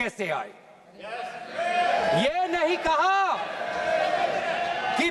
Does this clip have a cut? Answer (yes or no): no